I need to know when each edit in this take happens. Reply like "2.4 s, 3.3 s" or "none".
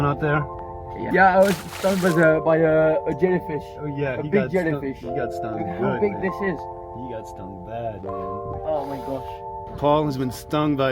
1.0 s